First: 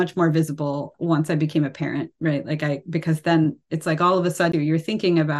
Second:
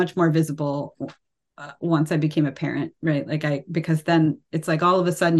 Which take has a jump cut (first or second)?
first